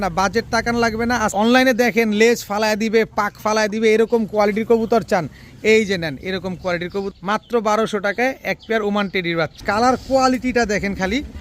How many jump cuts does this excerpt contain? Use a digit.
3